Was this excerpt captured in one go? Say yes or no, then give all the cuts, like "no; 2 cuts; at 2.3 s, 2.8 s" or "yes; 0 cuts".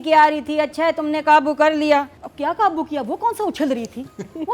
no; 1 cut; at 2.2 s